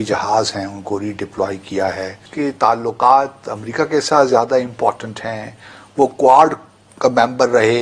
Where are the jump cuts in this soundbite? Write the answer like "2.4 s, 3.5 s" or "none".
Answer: 2.2 s